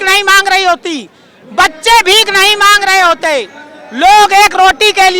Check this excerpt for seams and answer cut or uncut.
uncut